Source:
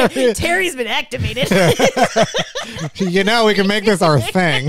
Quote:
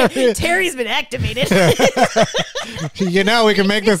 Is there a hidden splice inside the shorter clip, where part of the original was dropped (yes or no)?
no